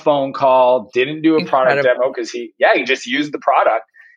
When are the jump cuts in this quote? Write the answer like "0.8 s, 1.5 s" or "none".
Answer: none